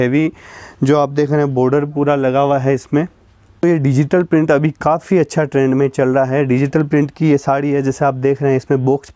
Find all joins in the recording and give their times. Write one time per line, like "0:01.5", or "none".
0:03.6